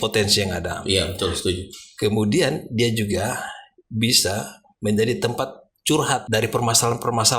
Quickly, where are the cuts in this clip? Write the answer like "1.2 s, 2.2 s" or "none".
6.2 s